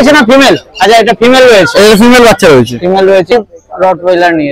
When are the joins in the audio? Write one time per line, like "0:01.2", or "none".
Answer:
0:03.3